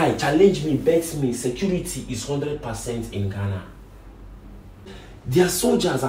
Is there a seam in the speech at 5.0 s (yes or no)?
yes